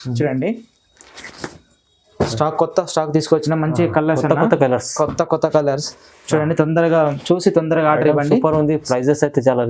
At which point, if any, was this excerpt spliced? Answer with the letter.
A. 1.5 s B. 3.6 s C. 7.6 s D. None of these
D